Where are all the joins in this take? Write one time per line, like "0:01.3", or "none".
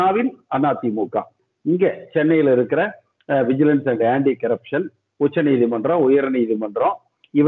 0:01.5